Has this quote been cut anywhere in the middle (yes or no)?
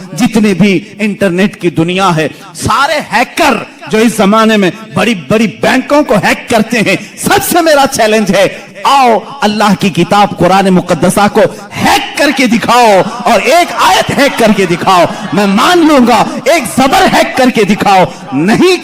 no